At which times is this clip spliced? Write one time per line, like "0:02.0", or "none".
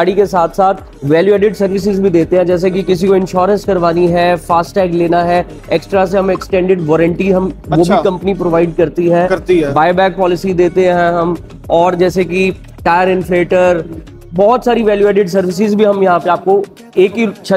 none